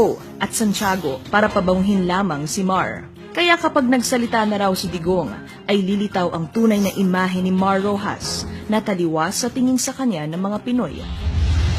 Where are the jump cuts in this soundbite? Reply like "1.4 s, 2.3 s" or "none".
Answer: 10.2 s